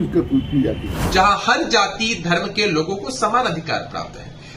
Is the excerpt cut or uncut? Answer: cut